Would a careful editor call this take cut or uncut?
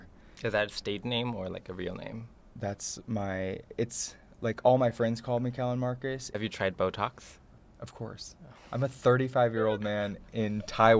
cut